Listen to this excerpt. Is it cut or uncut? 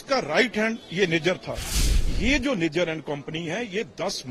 cut